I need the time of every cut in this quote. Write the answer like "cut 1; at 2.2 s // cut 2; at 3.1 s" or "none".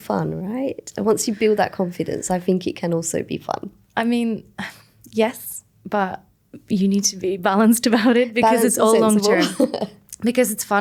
none